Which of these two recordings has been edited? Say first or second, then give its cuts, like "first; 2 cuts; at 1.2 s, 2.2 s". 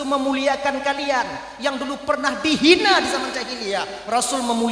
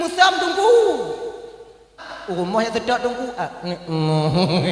second; 1 cut; at 2.1 s